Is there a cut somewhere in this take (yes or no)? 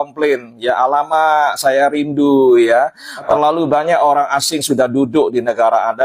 yes